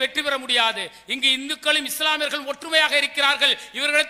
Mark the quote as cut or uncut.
uncut